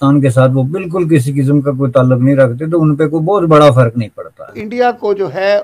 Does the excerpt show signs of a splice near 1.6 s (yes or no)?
no